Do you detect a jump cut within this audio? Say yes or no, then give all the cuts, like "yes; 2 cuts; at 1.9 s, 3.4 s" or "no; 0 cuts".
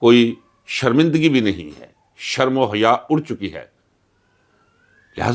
no; 0 cuts